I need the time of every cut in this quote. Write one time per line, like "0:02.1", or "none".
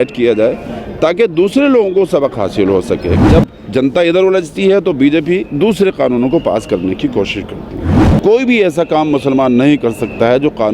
0:03.2
0:08.0